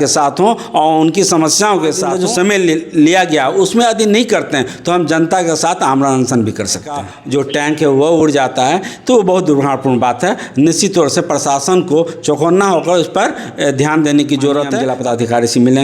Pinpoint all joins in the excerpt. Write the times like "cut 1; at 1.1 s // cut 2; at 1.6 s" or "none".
cut 1; at 2.1 s // cut 2; at 7.2 s // cut 3; at 14.8 s